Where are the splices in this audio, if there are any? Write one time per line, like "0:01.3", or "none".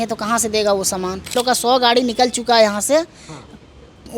0:01.3